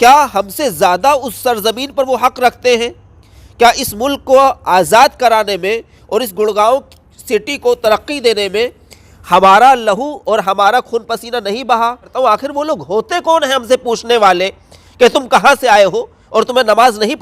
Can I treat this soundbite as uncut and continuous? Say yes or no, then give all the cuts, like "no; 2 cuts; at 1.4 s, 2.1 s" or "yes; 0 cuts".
no; 1 cut; at 12.1 s